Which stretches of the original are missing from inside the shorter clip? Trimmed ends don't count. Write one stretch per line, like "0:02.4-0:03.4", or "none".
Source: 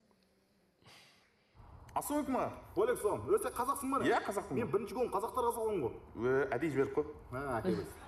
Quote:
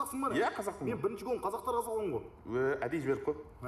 none